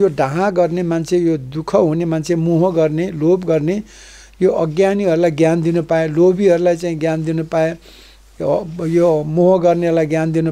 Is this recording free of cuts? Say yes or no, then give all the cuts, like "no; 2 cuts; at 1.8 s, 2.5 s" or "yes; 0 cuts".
yes; 0 cuts